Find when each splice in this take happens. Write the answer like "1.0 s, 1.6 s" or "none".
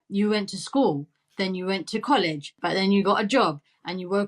2.6 s